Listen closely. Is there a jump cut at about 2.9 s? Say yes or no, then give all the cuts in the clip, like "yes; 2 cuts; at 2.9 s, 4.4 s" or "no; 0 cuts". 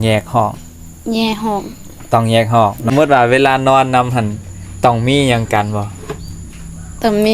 yes; 1 cut; at 2.9 s